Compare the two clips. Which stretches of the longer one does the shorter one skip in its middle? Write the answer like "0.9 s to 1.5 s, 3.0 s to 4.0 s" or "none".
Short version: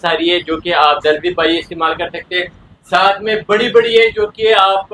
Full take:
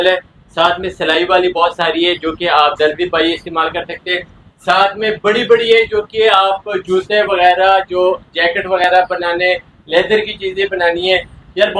none